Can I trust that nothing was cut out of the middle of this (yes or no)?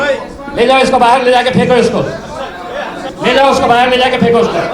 no